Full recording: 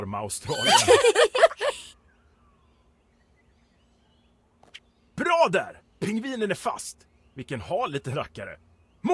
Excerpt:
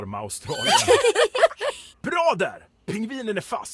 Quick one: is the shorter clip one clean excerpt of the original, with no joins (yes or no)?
no